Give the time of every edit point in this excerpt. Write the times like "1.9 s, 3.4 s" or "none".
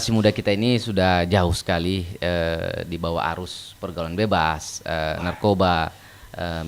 none